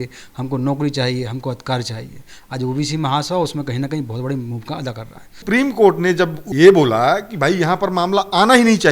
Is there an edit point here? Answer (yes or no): yes